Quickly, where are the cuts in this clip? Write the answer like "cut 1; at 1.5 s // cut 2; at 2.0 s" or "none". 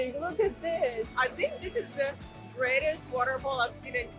cut 1; at 1.1 s